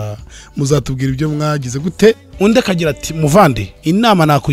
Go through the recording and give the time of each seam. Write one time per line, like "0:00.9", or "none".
0:02.3